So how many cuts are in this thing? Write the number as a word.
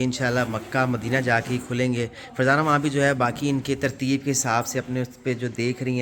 zero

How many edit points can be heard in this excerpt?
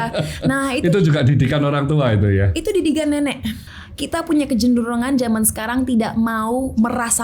one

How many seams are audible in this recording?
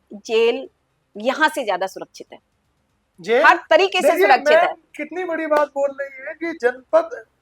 zero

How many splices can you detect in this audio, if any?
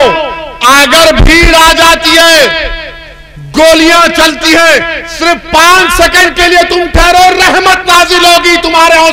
zero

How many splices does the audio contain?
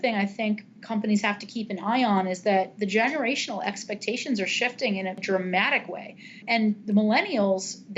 two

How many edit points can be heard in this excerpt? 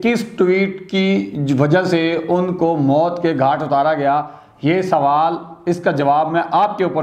zero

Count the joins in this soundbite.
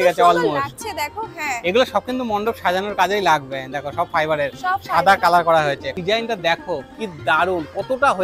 one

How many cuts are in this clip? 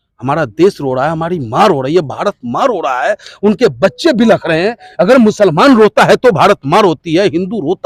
zero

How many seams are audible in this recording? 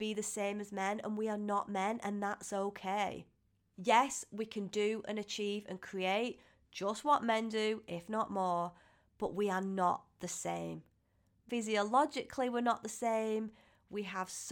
one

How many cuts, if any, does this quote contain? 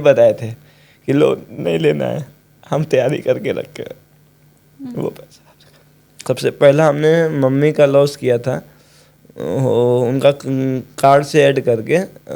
one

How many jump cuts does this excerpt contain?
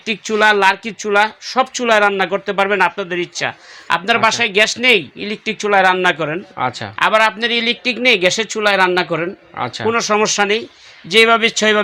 zero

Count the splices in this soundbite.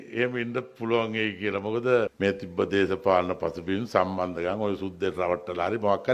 one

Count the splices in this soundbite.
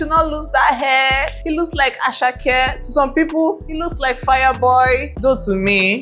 zero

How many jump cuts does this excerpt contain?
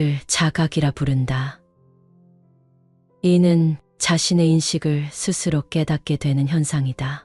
two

